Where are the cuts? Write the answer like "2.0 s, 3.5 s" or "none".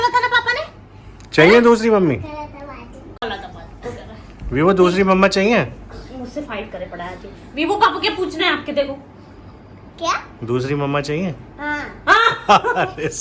none